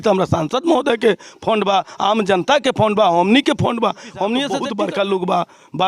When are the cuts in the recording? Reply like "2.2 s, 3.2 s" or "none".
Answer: 4.6 s

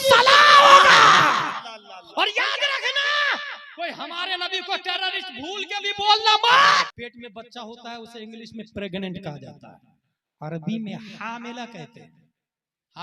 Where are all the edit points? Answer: 1.6 s, 6.9 s

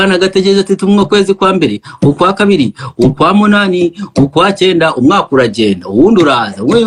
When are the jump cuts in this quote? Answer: none

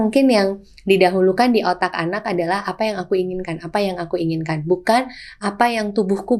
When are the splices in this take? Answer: none

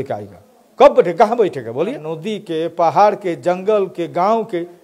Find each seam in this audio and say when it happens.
2.1 s

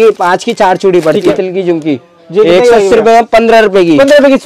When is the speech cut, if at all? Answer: 1.3 s

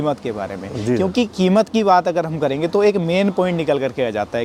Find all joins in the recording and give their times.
none

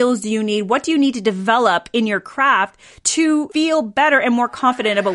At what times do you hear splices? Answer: 3.2 s

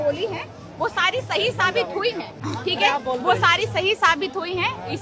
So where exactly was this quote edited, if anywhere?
2.4 s

